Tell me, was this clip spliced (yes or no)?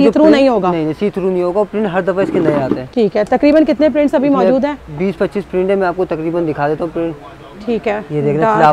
no